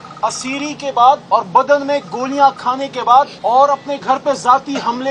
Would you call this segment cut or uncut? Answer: cut